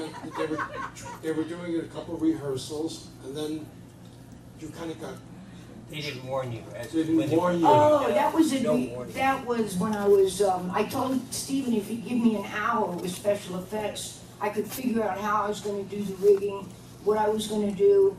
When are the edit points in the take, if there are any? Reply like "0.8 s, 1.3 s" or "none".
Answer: 3.3 s